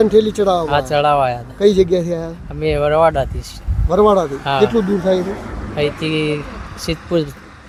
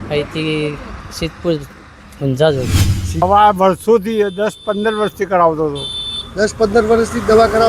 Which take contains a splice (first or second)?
second